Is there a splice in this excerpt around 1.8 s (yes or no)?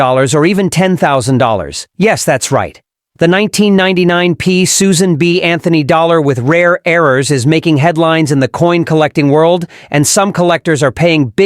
yes